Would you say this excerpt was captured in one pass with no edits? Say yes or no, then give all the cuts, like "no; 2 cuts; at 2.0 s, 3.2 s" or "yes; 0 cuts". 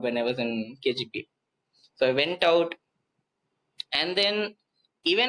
yes; 0 cuts